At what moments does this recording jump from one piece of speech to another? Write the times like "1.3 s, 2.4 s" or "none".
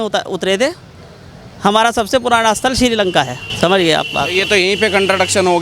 3.4 s